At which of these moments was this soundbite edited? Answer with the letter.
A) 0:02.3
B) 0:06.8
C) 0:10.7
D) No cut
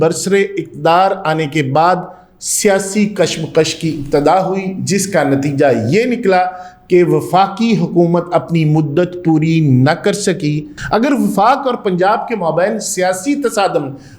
C